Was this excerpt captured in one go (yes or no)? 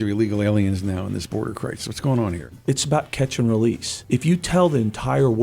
no